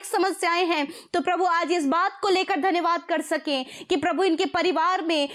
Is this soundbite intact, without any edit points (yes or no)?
yes